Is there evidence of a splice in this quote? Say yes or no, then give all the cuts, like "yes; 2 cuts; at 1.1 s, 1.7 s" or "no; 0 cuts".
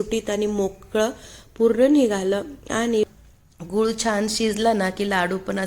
yes; 1 cut; at 3.0 s